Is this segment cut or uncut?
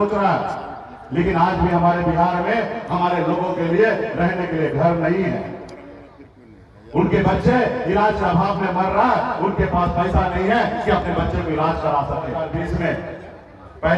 cut